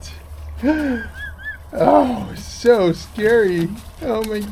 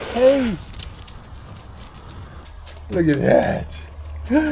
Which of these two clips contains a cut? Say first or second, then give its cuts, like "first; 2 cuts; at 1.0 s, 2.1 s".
second; 1 cut; at 2.4 s